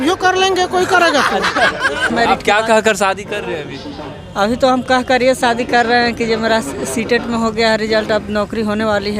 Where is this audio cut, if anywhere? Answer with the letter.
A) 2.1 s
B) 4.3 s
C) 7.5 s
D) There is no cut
A